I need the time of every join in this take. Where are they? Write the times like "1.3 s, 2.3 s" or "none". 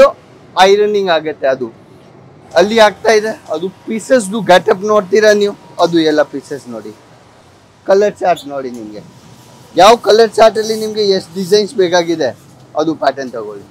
none